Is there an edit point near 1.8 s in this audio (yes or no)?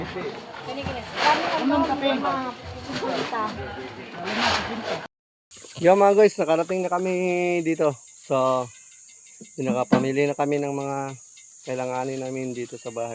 no